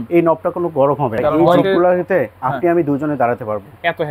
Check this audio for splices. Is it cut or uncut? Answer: cut